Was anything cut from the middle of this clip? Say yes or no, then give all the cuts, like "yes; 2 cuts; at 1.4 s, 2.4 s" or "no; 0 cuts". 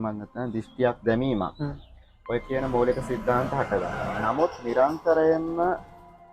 no; 0 cuts